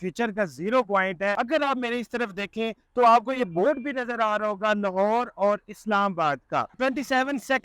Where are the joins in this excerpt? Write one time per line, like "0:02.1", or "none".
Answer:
0:06.7